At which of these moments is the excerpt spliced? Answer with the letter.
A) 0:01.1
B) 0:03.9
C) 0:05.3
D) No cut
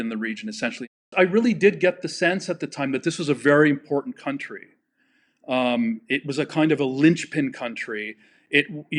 A